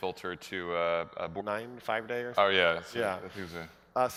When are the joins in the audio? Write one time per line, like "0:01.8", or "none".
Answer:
none